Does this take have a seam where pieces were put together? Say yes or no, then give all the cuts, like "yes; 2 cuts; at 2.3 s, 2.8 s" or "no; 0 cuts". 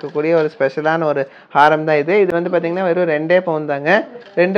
no; 0 cuts